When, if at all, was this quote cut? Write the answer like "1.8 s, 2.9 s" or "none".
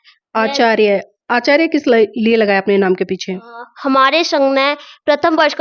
none